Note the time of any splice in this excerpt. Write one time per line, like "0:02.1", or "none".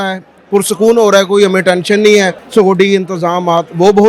0:02.4